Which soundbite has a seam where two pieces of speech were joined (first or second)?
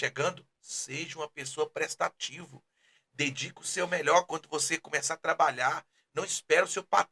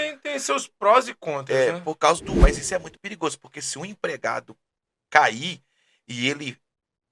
second